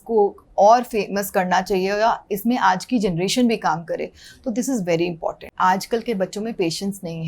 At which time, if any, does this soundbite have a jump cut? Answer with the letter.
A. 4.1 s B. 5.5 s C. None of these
B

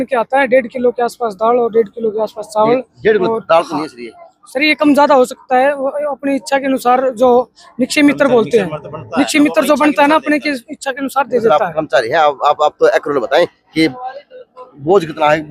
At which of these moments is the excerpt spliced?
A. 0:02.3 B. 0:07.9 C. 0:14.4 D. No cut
D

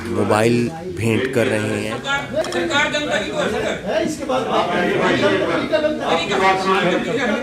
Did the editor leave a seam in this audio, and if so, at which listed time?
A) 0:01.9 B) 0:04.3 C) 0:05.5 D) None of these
A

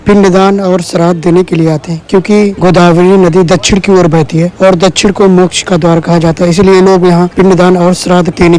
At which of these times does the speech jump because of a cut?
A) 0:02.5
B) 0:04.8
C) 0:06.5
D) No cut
D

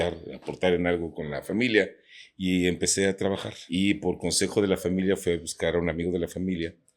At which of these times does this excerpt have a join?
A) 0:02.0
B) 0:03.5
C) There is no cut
B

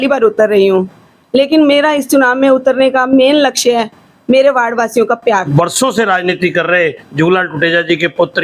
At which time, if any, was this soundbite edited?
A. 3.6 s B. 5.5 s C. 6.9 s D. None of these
B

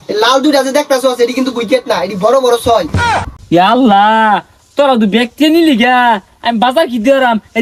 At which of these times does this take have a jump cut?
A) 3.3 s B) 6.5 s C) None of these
C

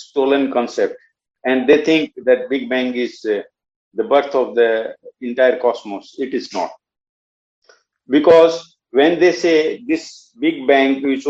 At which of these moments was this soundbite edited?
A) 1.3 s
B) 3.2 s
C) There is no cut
A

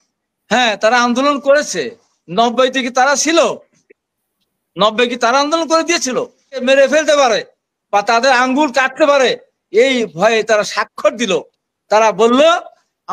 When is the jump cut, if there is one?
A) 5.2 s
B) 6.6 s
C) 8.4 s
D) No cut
B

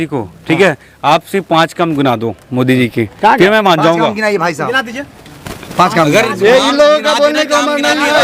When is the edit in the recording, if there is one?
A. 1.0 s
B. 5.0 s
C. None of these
C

